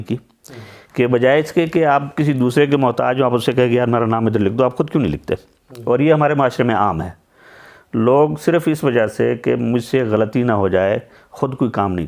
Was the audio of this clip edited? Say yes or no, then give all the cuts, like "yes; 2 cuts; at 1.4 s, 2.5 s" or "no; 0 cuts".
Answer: no; 0 cuts